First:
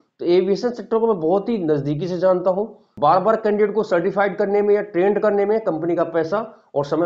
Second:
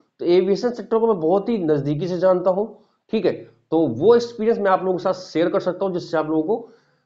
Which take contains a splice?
first; 1 cut; at 2.8 s

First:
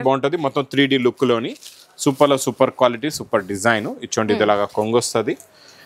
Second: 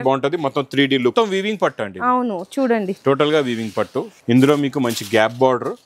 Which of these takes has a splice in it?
second; 2 cuts; at 1.1 s, 4.1 s

